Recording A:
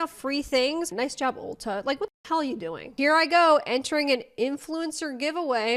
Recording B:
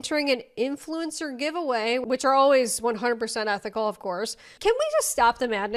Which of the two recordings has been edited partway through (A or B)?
A